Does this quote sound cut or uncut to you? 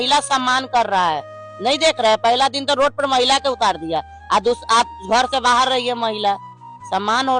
uncut